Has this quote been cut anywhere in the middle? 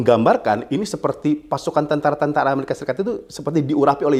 no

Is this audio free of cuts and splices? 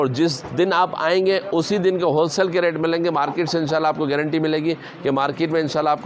yes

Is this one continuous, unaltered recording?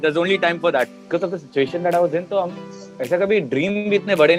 no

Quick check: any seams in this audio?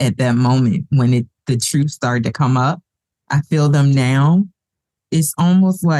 no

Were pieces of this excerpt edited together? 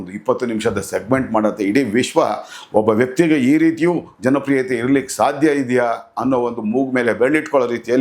no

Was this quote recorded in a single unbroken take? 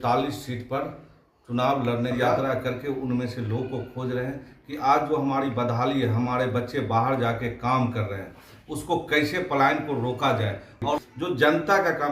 no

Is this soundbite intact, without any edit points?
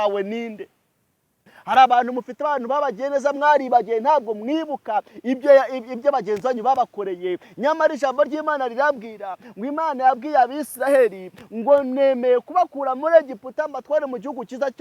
no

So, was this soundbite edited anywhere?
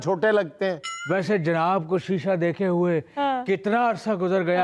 yes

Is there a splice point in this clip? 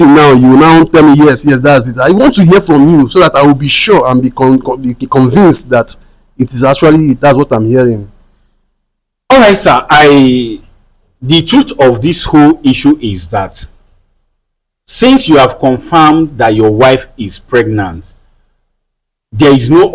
no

